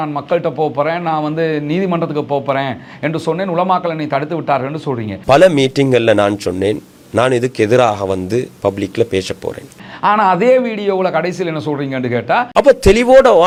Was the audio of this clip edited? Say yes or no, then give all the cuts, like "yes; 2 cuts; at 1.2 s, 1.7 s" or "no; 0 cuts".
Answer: no; 0 cuts